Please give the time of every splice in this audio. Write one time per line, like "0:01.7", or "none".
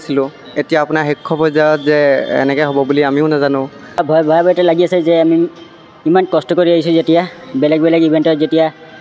0:03.8